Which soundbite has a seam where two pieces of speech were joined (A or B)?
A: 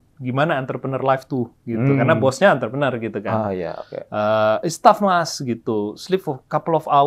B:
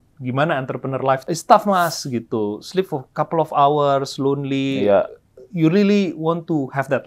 B